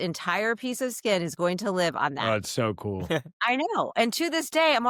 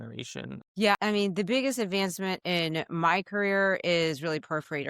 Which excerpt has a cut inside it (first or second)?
second